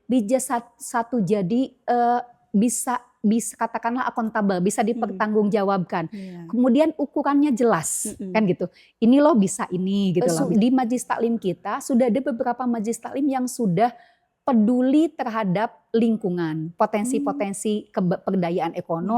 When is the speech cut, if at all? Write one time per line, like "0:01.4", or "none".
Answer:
0:10.4